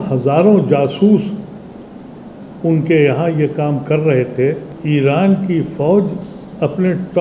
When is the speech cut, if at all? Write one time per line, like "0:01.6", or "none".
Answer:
0:04.7